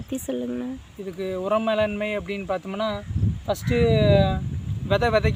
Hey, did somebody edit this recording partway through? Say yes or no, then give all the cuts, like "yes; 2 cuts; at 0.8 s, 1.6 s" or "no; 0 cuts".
no; 0 cuts